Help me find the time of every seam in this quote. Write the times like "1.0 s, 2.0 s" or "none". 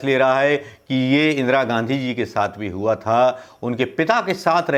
none

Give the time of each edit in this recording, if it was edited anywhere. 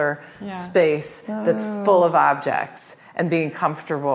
none

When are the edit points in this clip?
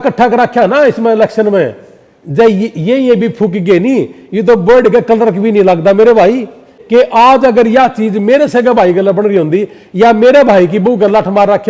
6.7 s

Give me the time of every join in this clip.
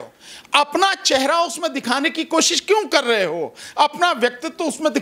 none

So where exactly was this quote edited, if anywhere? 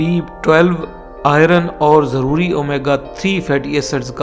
none

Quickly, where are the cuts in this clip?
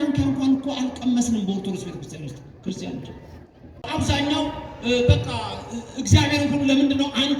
3.9 s

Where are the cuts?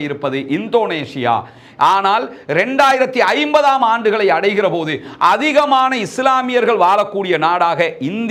none

